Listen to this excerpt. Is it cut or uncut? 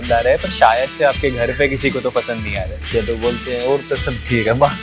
cut